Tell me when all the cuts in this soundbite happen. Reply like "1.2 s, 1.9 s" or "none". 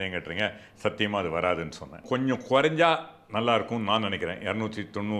2.0 s